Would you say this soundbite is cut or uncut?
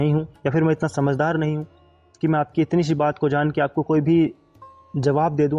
uncut